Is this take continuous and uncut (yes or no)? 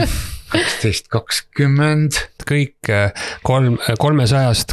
no